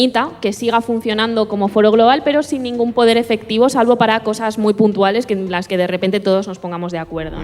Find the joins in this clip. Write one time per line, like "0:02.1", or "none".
none